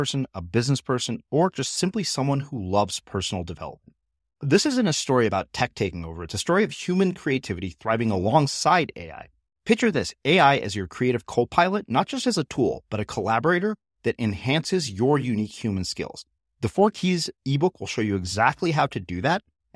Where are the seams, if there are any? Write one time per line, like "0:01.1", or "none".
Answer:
none